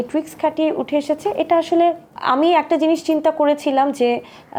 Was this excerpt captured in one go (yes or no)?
yes